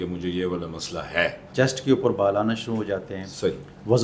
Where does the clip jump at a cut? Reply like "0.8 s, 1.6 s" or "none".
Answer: 1.5 s